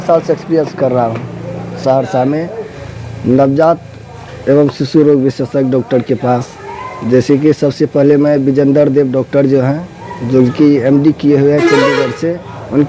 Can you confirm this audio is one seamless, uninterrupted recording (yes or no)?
yes